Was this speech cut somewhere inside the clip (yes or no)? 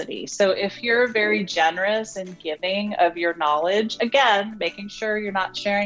no